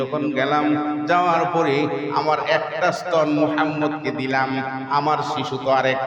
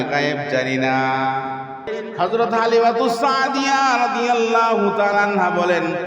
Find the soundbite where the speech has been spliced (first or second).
second